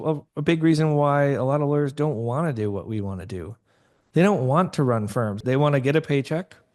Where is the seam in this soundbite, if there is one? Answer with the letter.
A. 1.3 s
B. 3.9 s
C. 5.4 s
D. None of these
C